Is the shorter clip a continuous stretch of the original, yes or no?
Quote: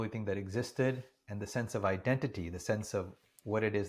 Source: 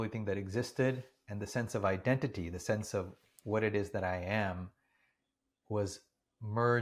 yes